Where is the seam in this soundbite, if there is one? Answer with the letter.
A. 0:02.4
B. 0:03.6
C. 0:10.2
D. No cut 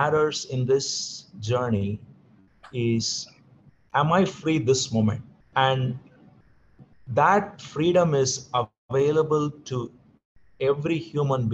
D